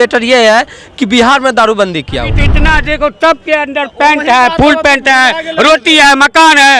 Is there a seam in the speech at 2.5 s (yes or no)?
yes